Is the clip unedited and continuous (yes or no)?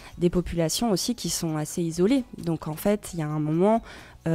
yes